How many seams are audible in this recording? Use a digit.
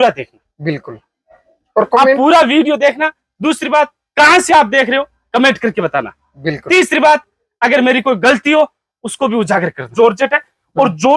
1